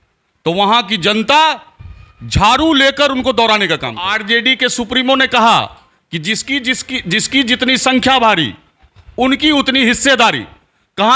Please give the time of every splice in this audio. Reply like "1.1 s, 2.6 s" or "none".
4.1 s

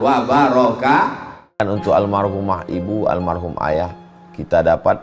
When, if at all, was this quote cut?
1.6 s

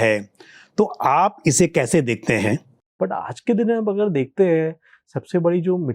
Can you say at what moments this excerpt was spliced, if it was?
2.8 s

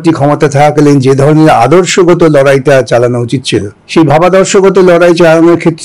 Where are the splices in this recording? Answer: 3.8 s

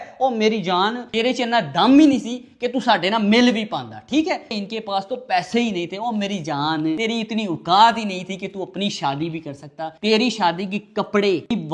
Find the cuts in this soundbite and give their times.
4.5 s

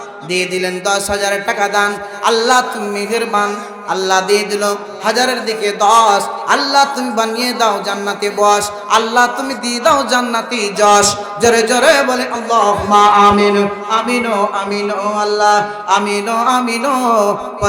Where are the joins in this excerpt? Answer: none

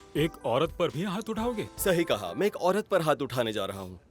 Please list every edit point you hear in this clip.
1.7 s

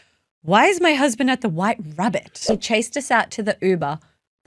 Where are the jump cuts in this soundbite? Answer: 2.4 s

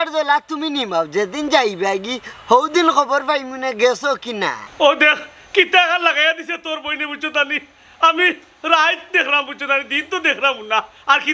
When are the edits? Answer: 4.6 s

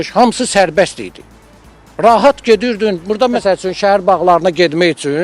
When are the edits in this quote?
3.4 s

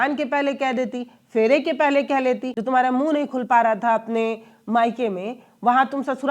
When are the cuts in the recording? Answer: 2.5 s

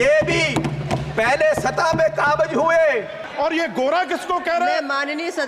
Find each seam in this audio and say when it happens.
3.2 s

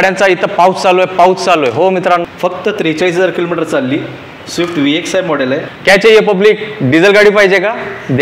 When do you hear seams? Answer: 2.3 s, 5.7 s

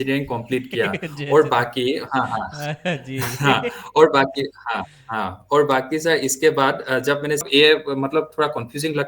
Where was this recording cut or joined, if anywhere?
7.5 s

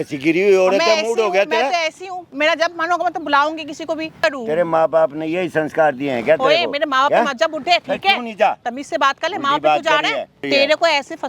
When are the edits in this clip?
4.2 s, 10.4 s

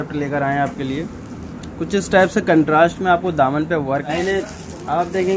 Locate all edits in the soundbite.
4.1 s

